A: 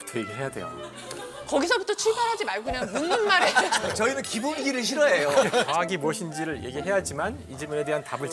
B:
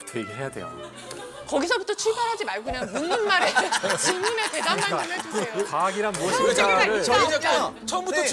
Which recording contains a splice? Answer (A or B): A